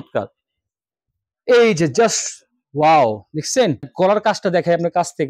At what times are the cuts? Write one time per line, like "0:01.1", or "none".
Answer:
0:03.9